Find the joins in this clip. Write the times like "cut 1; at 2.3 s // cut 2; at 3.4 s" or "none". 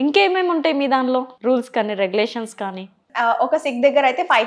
cut 1; at 1.3 s